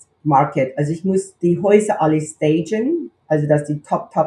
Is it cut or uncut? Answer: cut